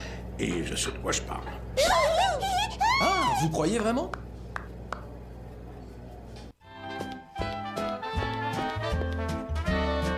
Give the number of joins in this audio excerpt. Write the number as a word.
one